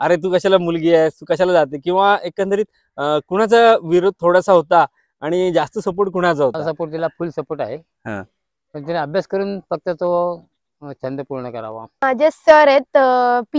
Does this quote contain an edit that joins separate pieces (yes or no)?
yes